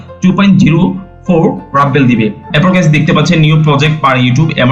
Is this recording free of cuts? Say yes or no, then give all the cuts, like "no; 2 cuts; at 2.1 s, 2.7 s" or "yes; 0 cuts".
no; 1 cut; at 2.5 s